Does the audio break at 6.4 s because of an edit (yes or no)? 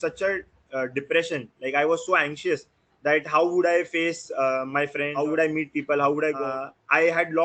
yes